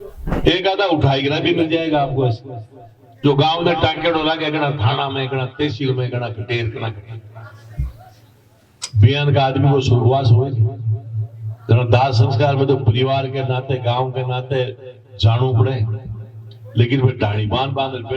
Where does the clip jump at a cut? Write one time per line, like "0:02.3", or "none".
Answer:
none